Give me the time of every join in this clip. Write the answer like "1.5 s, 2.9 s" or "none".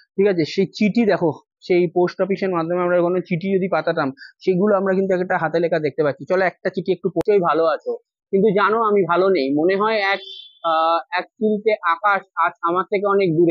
7.2 s